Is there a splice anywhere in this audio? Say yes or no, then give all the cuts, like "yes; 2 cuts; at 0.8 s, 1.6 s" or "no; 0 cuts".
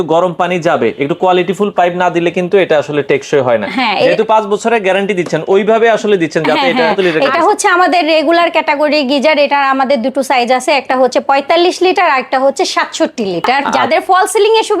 yes; 2 cuts; at 7.0 s, 13.8 s